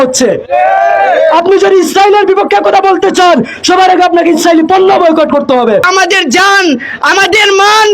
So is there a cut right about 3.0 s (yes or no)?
no